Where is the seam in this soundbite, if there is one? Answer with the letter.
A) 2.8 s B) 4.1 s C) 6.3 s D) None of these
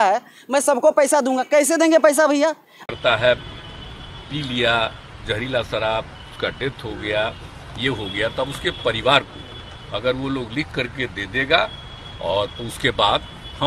A